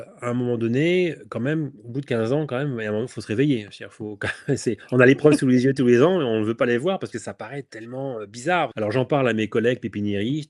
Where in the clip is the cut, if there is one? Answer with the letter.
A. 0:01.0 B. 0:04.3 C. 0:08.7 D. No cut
C